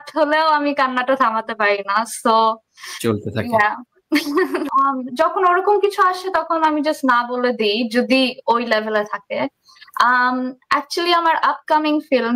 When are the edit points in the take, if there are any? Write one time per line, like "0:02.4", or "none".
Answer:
0:04.7